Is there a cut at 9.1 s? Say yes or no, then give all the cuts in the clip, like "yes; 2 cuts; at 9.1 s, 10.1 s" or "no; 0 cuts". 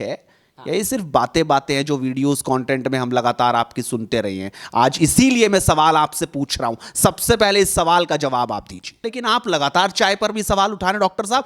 yes; 1 cut; at 9.1 s